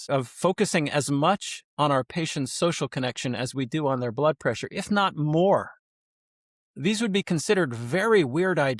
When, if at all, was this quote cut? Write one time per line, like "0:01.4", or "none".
none